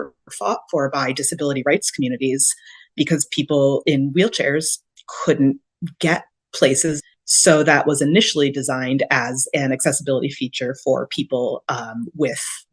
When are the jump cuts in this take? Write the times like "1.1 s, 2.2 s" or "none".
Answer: 7.0 s